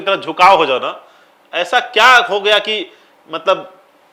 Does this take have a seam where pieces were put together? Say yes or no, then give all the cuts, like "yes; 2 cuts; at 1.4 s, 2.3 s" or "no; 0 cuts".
no; 0 cuts